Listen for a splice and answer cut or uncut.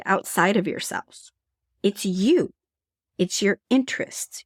uncut